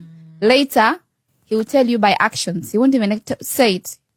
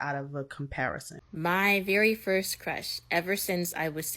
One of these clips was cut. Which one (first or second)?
second